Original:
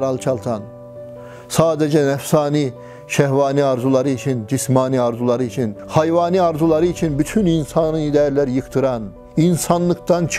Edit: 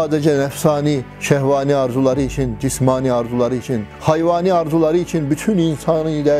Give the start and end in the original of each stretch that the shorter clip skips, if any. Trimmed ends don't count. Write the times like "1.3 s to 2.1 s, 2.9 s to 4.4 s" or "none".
2.8 s to 3.0 s